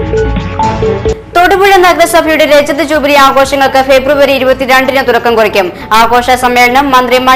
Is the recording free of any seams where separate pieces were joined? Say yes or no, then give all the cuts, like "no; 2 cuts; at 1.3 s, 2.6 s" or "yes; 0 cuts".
yes; 0 cuts